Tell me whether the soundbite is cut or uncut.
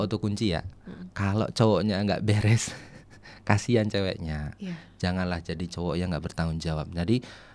uncut